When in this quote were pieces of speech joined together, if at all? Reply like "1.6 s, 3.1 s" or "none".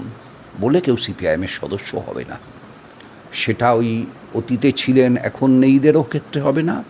none